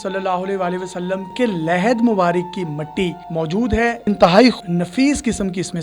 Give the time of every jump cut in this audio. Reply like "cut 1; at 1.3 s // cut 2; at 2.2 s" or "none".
cut 1; at 1.3 s // cut 2; at 4.0 s // cut 3; at 4.6 s